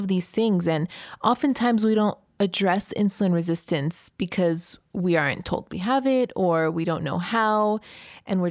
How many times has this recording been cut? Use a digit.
0